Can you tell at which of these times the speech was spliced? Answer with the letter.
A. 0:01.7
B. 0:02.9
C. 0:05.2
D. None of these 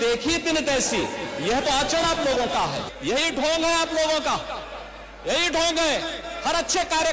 B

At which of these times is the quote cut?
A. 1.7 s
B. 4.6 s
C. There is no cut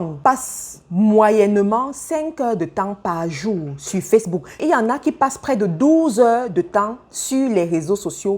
B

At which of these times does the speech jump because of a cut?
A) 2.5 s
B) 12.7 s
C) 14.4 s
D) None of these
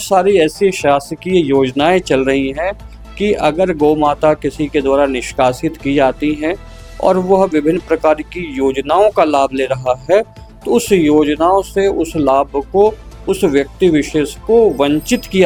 D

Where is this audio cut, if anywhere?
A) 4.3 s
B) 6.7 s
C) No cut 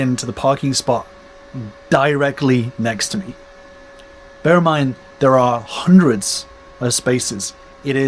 C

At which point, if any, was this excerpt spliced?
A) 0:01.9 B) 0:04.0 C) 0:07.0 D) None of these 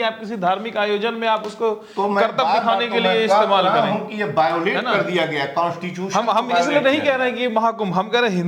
D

